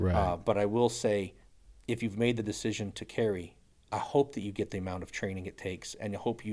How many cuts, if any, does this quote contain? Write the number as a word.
zero